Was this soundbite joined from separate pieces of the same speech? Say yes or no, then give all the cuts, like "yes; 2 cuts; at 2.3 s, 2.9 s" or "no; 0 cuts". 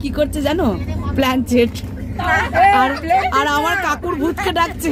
no; 0 cuts